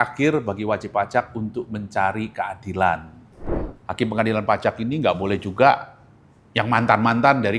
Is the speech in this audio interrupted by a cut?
yes; 1 cut; at 3.5 s

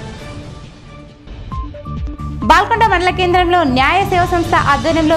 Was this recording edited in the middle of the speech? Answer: no; 0 cuts

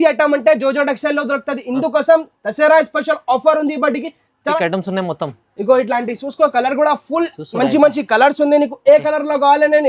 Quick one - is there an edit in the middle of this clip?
yes; 1 cut; at 4.5 s

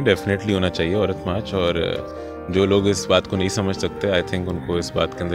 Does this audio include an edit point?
no; 0 cuts

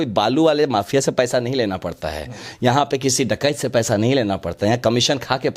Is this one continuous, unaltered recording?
yes; 0 cuts

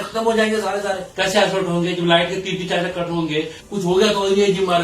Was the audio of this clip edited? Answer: yes; 2 cuts; at 1.1 s, 3.6 s

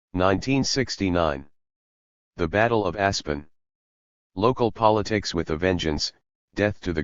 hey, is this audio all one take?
no; 1 cut; at 0.9 s

